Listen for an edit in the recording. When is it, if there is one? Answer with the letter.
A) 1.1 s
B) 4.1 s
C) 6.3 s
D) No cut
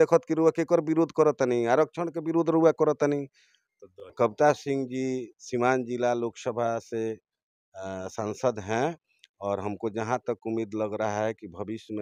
B